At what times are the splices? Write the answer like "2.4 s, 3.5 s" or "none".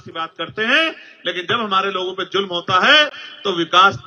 none